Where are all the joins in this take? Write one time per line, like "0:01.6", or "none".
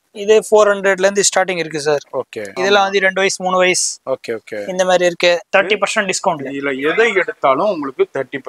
0:02.5
0:05.5